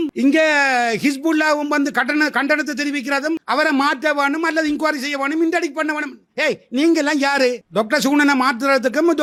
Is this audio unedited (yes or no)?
yes